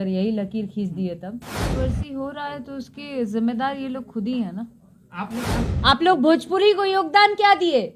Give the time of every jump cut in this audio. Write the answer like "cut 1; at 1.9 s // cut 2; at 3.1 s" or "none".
cut 1; at 1.7 s // cut 2; at 5.6 s